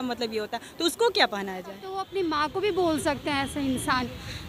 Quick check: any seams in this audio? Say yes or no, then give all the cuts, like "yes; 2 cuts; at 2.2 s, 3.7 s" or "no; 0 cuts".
yes; 1 cut; at 1.9 s